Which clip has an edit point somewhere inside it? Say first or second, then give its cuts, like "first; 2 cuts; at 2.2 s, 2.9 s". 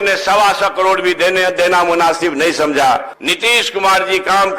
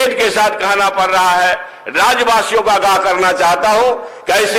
first; 1 cut; at 3.2 s